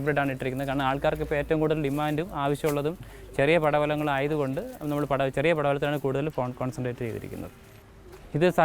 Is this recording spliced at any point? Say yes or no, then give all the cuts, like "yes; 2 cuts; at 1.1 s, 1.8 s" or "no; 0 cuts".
yes; 1 cut; at 7.6 s